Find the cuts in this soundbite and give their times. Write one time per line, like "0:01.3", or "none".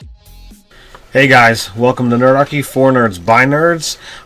none